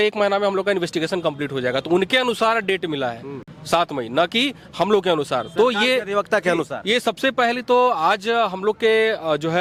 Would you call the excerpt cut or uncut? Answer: uncut